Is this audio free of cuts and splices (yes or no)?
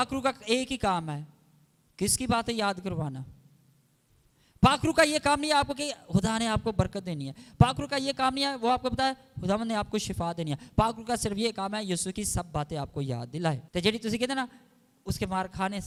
yes